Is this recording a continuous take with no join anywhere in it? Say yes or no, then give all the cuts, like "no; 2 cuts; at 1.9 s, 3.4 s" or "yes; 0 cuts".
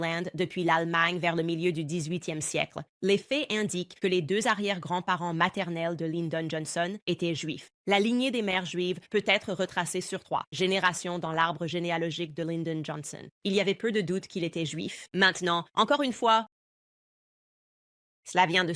no; 2 cuts; at 2.8 s, 7.8 s